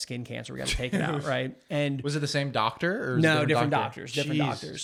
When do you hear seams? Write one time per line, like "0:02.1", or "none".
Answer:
none